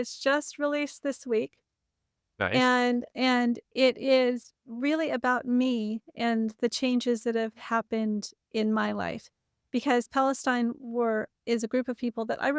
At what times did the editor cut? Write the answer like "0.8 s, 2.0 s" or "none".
none